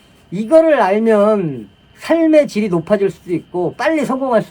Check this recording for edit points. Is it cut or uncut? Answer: uncut